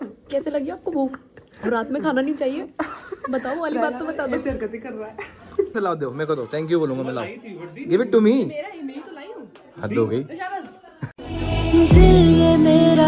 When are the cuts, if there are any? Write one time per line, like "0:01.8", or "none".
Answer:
0:05.7
0:11.0